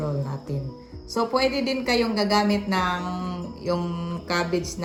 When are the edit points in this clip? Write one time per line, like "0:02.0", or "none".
none